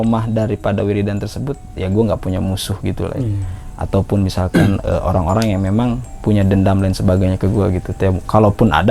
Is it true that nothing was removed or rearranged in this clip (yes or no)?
yes